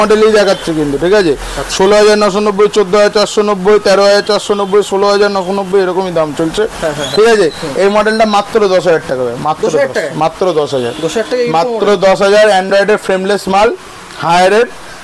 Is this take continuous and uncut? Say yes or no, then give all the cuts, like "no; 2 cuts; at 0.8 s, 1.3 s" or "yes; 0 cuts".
yes; 0 cuts